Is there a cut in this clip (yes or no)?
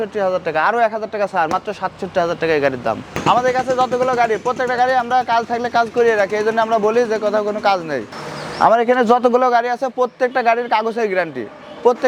yes